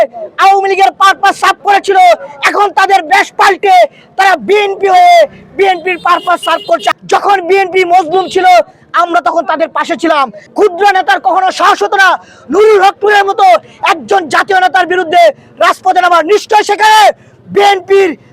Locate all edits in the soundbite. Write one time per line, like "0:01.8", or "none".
0:06.9
0:10.4